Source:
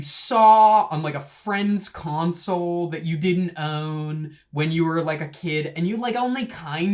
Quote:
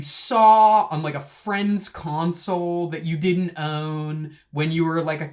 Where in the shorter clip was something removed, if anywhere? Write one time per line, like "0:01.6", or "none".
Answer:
none